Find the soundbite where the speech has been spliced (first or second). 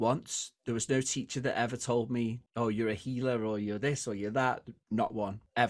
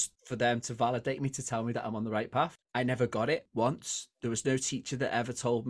second